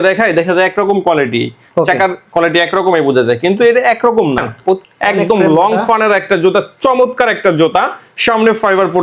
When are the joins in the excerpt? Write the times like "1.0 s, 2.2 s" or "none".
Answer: 4.8 s